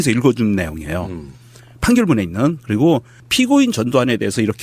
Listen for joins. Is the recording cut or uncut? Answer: uncut